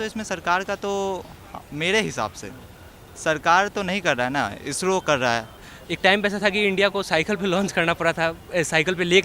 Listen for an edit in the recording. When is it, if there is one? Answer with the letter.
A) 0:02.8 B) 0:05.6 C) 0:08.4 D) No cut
B